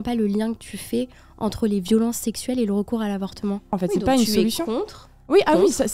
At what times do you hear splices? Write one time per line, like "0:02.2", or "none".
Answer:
0:03.8